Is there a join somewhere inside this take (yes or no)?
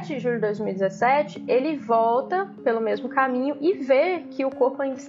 no